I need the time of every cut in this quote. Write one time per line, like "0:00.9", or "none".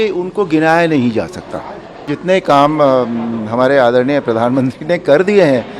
0:02.1